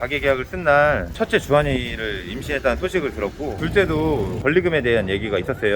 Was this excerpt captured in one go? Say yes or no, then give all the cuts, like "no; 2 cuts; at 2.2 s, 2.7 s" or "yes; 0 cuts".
no; 2 cuts; at 3.5 s, 4.3 s